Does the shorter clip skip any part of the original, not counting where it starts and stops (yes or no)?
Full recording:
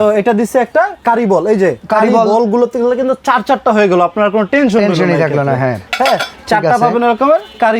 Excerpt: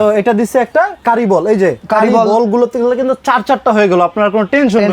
no